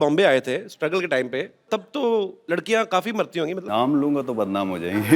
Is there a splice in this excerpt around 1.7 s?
yes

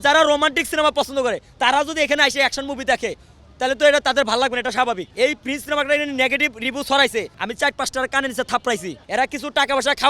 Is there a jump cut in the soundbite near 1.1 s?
no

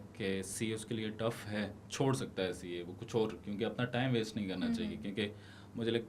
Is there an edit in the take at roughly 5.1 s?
no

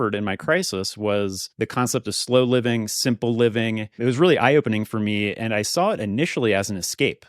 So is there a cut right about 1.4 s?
yes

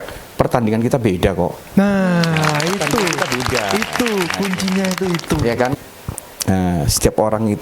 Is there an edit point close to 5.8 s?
yes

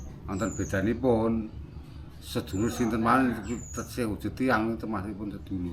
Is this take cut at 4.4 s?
no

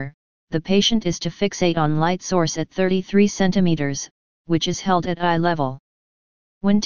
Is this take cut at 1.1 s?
yes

